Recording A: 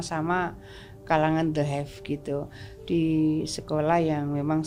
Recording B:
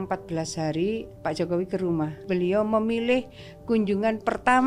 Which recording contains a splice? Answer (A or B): B